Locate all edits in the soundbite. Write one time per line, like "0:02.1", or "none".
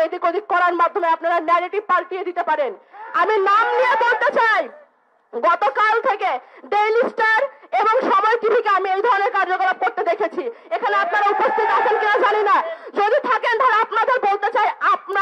none